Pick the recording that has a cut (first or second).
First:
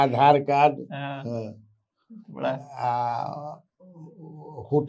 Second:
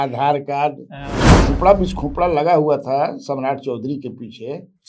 second